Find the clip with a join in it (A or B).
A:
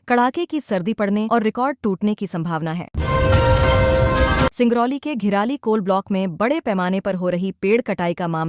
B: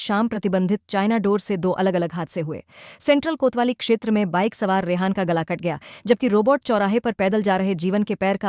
A